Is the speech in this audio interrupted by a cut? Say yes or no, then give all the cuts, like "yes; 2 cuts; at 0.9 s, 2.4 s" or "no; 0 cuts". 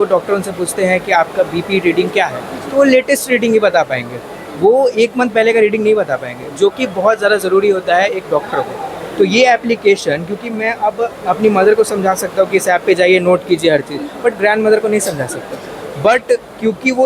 no; 0 cuts